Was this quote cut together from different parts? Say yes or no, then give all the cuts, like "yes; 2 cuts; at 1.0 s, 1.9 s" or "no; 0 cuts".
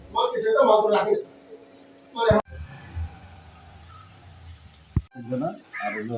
yes; 2 cuts; at 2.5 s, 5.0 s